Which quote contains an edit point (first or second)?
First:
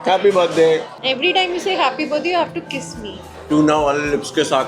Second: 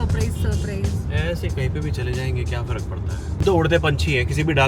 first